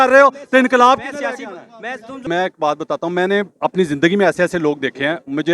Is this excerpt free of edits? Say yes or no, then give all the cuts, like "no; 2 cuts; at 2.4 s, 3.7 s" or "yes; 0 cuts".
no; 1 cut; at 2.2 s